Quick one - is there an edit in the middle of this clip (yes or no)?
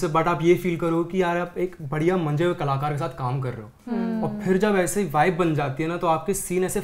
no